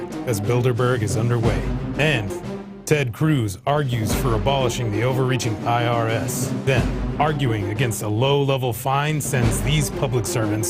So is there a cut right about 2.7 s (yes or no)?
no